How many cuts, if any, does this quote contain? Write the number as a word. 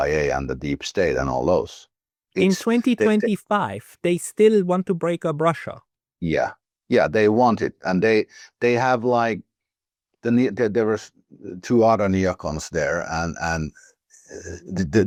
zero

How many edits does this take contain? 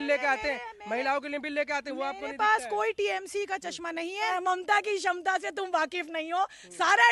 one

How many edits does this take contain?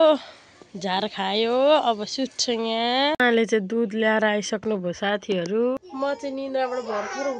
two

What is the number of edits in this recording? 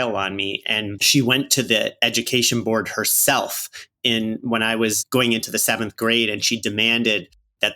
one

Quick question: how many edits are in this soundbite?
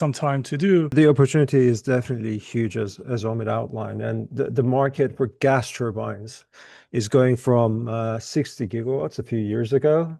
one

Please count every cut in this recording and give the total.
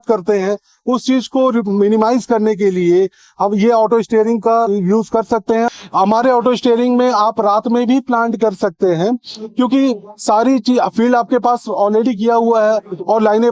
one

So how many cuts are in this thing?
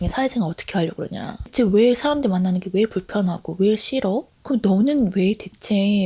two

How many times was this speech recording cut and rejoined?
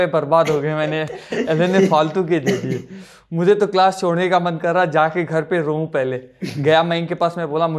zero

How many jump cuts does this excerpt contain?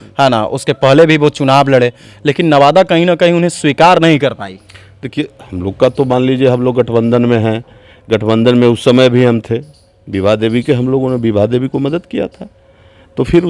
zero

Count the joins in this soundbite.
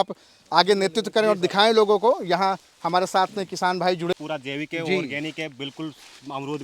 one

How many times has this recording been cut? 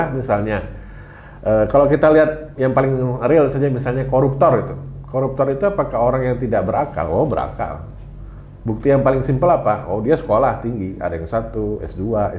zero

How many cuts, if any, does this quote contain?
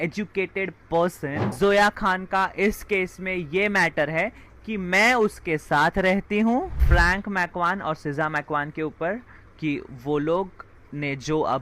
two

